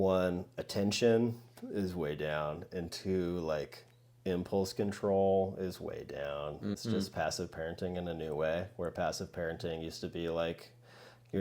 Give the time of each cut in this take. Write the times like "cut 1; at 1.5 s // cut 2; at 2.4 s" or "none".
cut 1; at 6.8 s